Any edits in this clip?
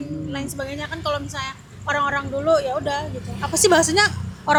no; 0 cuts

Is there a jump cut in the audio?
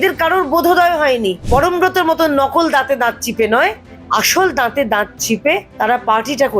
yes; 2 cuts; at 1.5 s, 5.7 s

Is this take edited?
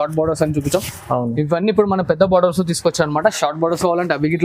no; 0 cuts

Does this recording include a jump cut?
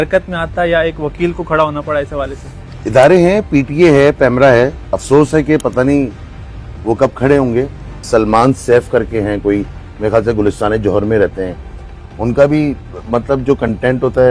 yes; 1 cut; at 8.0 s

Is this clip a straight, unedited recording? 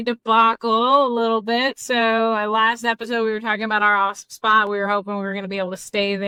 yes; 0 cuts

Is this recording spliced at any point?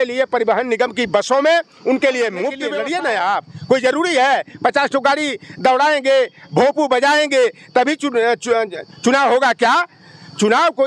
yes; 1 cut; at 2.6 s

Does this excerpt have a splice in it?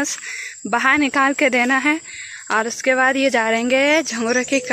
no; 0 cuts

